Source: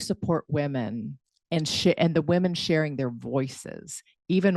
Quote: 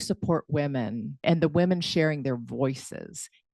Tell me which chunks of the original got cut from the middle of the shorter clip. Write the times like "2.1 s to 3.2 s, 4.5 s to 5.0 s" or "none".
1.2 s to 2.0 s